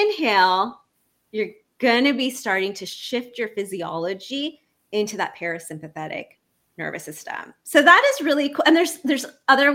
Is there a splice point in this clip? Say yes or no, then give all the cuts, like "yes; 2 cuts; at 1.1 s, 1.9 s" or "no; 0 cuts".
no; 0 cuts